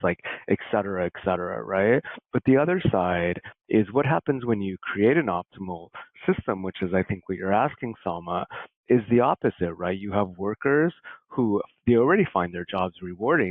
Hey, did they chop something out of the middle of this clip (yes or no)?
no